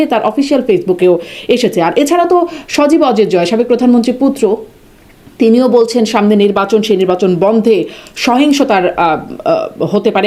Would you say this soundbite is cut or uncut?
uncut